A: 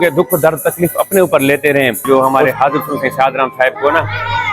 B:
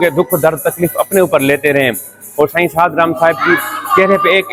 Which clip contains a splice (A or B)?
A